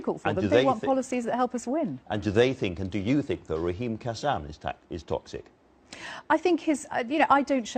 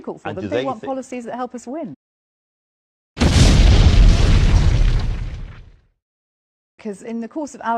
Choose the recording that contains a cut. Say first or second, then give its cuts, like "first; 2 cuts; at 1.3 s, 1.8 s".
first; 1 cut; at 2.0 s